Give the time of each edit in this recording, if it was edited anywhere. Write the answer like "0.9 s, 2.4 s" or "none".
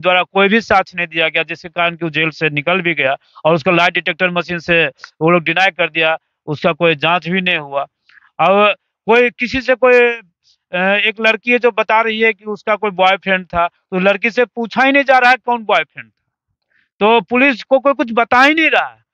none